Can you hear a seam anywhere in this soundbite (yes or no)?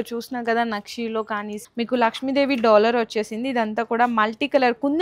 yes